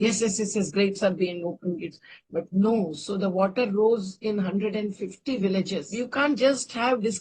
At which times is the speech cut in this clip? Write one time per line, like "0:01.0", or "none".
0:05.8